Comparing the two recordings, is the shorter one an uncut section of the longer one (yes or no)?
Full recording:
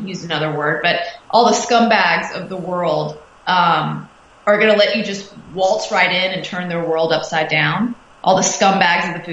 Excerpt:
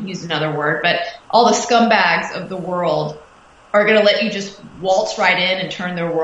no